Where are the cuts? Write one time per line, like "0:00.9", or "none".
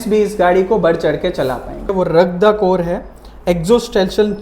0:01.9